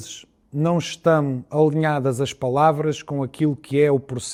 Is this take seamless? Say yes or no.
yes